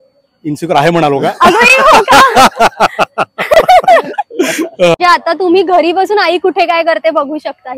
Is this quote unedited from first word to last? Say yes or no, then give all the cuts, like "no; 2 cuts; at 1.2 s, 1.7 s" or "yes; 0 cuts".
no; 1 cut; at 5.0 s